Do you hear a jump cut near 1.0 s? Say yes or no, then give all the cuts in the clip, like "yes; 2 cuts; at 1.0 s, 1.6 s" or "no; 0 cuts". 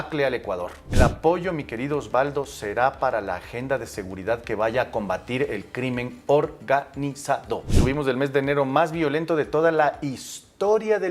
yes; 2 cuts; at 1.0 s, 7.7 s